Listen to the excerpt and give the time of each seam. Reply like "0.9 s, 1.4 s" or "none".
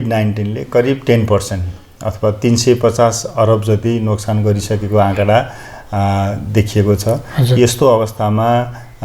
none